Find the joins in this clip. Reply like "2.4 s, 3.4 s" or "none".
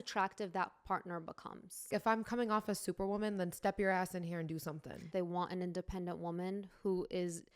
1.9 s, 5.1 s

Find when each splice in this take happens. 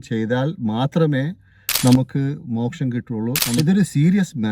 3.6 s

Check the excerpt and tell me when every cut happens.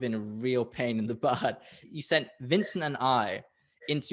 1.8 s

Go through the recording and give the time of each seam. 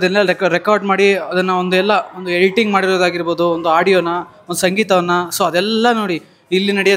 none

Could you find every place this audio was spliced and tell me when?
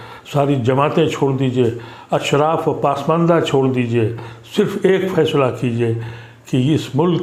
none

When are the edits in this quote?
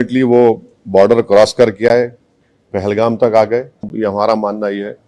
3.9 s

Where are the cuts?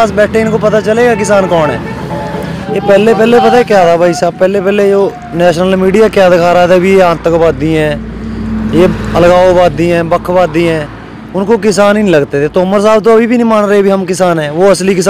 2.6 s

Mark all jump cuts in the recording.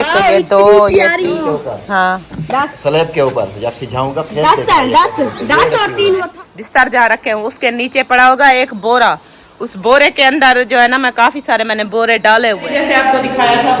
1.3 s, 6.3 s, 12.7 s

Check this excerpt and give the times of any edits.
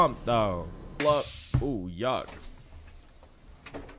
1.0 s

